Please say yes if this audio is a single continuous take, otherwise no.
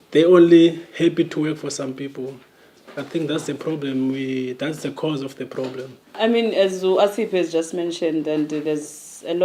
yes